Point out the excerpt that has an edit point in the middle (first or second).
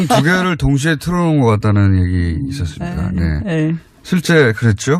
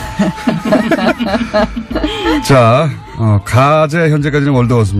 first